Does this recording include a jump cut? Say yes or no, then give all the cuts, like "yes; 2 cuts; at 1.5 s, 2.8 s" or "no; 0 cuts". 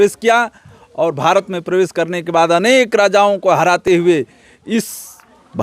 no; 0 cuts